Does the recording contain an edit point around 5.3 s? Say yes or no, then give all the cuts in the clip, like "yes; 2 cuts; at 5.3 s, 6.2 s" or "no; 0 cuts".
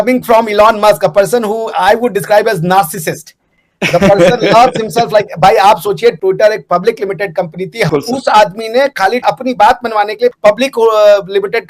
no; 2 cuts; at 7.9 s, 10.3 s